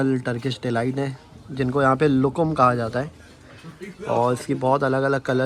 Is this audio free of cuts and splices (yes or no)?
yes